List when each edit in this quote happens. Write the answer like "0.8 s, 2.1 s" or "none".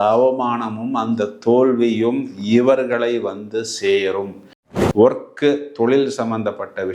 4.6 s